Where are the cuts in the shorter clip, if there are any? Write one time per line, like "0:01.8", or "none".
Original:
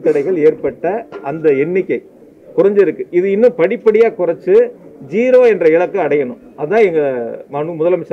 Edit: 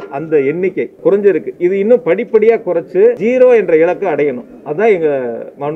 0:00.9
0:03.2